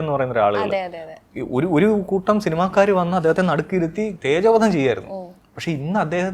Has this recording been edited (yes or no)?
no